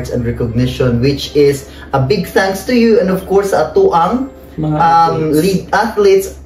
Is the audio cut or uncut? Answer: uncut